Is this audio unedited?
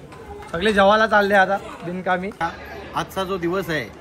no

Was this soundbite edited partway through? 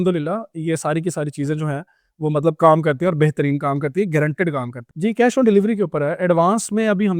yes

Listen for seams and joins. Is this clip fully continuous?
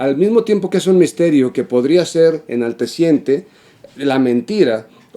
yes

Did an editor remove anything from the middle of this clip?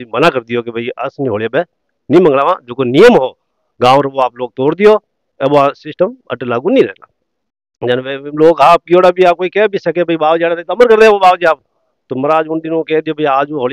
no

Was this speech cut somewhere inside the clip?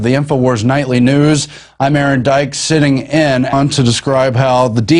no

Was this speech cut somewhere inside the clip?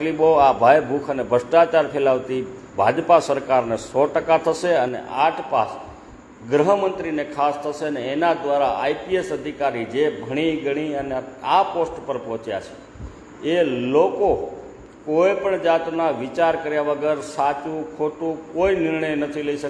no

